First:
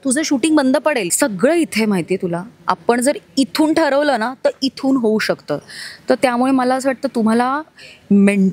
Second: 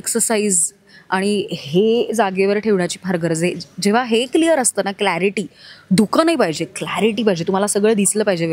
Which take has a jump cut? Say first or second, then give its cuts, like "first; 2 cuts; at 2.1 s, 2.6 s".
first; 1 cut; at 1.1 s